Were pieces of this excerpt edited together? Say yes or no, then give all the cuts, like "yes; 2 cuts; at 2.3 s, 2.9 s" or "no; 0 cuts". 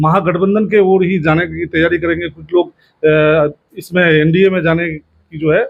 no; 0 cuts